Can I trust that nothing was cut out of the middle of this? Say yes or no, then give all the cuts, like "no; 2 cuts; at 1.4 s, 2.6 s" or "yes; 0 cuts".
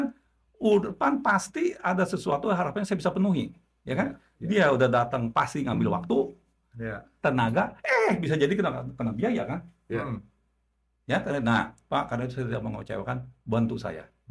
yes; 0 cuts